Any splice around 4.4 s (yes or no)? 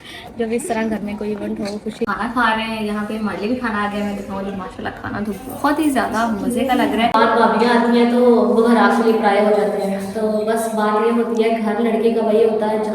no